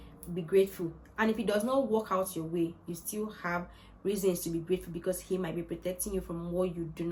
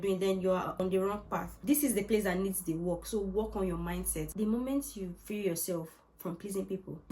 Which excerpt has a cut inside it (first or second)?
second